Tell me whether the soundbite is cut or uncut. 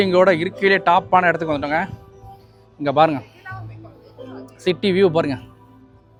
uncut